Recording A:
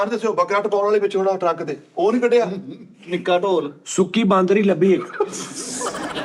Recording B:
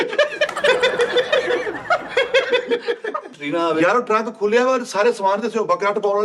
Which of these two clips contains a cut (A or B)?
B